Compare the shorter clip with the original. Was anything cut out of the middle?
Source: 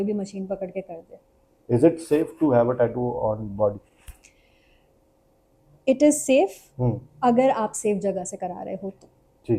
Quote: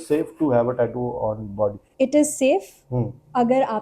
yes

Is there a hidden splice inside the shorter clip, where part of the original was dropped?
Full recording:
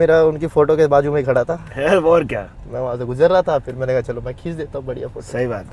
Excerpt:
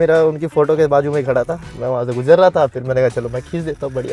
yes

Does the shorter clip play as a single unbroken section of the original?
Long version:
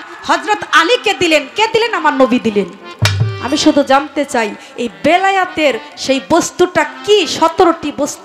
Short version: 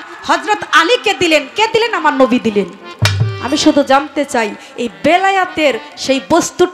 yes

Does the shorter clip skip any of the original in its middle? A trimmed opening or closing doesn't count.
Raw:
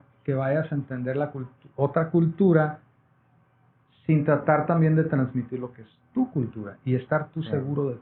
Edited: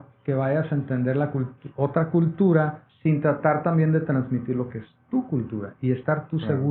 yes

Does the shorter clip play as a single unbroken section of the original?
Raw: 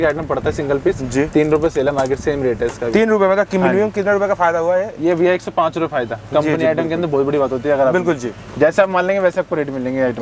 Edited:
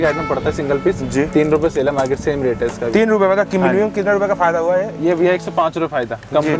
yes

